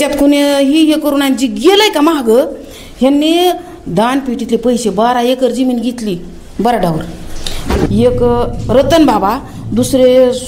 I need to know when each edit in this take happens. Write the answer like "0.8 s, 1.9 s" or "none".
7.9 s